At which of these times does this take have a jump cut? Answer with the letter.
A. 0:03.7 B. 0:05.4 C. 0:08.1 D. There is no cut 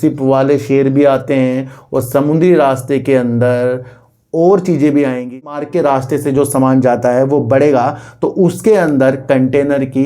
B